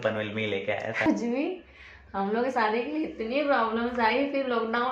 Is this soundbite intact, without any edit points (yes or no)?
no